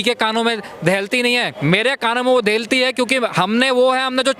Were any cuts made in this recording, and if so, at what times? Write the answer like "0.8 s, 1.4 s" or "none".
1.5 s